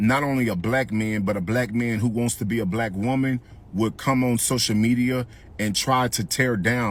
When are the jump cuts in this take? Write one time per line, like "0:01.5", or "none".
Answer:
none